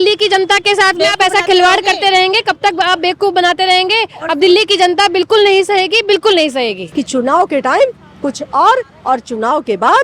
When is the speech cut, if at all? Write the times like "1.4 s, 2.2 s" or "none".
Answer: 6.8 s

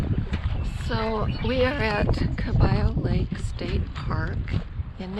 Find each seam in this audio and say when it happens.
none

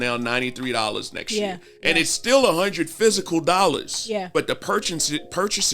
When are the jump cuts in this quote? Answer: 4.3 s

